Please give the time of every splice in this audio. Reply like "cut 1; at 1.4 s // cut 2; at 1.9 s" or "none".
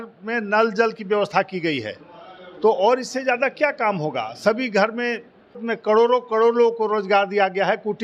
cut 1; at 5.6 s